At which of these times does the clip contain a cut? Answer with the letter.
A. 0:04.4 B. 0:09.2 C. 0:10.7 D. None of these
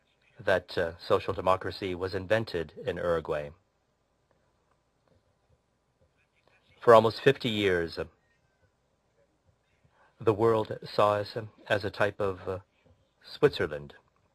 A